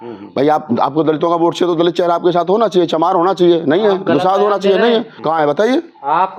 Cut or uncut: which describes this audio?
uncut